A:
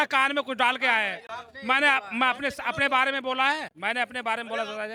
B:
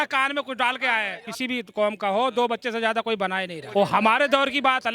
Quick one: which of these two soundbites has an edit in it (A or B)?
B